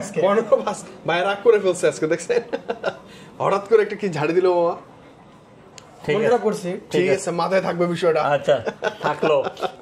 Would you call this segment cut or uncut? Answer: uncut